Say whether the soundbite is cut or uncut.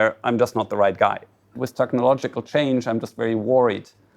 cut